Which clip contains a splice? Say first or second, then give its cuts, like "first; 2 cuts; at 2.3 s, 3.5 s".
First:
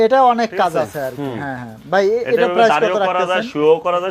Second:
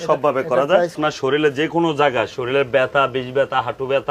second; 1 cut; at 1.1 s